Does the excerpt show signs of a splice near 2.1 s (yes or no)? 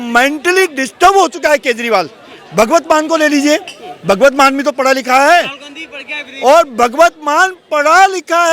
no